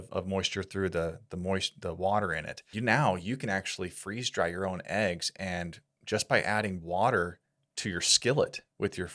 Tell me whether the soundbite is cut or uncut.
cut